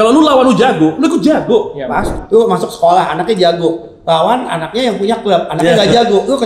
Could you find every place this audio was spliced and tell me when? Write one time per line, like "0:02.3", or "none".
0:02.2